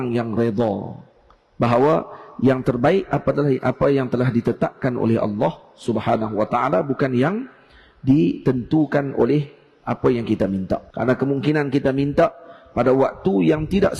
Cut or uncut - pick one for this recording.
cut